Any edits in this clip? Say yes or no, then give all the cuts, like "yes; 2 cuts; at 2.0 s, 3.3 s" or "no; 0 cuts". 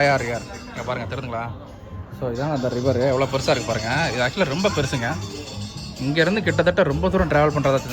no; 0 cuts